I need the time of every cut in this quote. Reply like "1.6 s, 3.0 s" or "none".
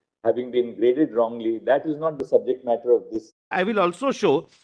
3.5 s